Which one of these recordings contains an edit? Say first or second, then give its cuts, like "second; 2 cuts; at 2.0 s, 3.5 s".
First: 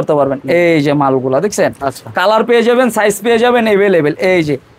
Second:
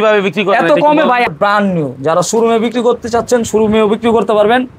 second; 1 cut; at 1.3 s